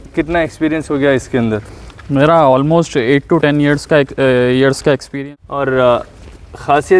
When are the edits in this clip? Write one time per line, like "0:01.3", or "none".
0:05.1